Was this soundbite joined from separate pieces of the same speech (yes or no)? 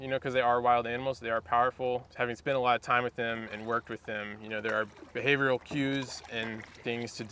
no